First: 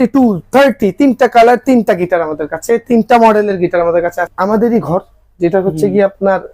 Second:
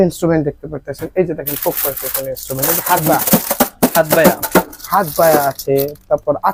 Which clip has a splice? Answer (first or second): first